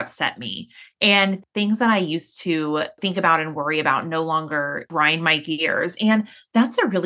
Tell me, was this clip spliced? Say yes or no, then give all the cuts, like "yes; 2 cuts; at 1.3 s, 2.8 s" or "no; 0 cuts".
yes; 3 cuts; at 1.4 s, 3.0 s, 4.9 s